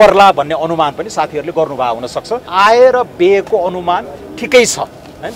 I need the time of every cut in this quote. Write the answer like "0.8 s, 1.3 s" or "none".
2.4 s